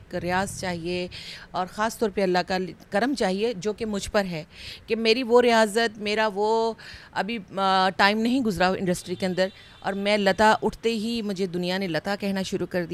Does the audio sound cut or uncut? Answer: uncut